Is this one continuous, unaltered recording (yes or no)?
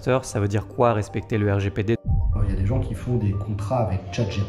no